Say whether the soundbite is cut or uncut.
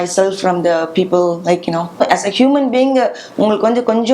cut